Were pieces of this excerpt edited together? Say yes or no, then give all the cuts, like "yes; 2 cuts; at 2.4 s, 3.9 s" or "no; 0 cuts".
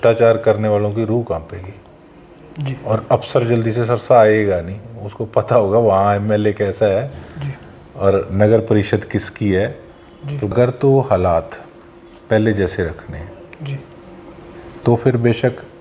yes; 1 cut; at 10.5 s